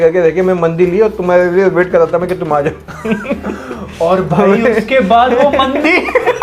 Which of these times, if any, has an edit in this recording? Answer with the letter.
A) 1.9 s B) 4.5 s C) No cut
C